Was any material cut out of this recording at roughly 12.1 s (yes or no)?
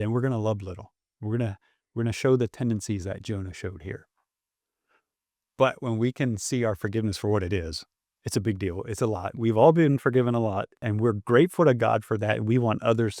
no